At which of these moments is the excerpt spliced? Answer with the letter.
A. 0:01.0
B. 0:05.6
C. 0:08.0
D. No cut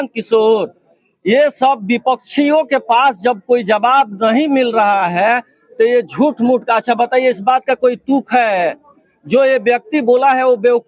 D